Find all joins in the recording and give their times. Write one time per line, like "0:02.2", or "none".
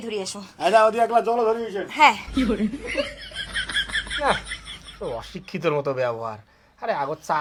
none